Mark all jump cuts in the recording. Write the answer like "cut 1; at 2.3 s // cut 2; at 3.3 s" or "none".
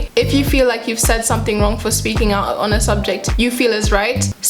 none

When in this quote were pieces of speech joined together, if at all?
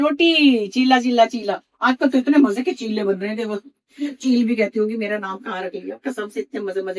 none

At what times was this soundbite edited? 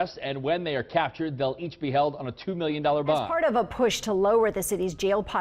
cut 1; at 3.3 s

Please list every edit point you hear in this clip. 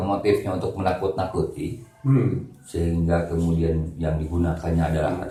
none

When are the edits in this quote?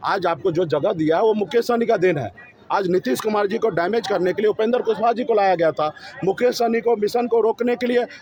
none

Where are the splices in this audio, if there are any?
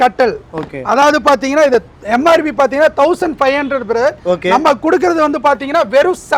none

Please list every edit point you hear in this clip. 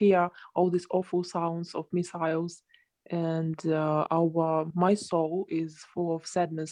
none

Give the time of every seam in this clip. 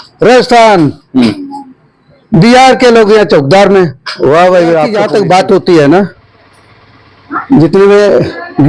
cut 1; at 5.0 s

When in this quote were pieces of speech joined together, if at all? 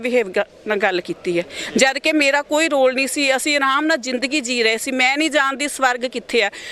none

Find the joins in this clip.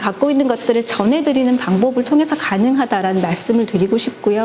none

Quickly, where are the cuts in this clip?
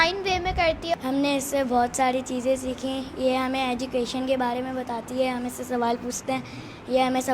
cut 1; at 1.0 s

